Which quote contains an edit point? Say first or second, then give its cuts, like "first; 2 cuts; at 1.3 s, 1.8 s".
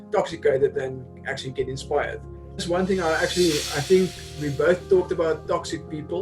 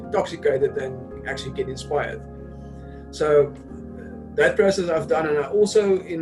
first; 1 cut; at 2.6 s